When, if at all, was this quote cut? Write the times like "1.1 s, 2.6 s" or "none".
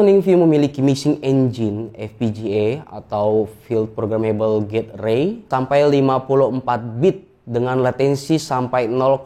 none